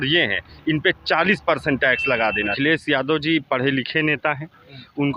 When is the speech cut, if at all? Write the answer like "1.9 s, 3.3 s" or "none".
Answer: 2.5 s